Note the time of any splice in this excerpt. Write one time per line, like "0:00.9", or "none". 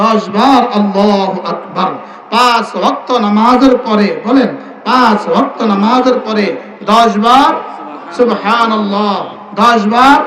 none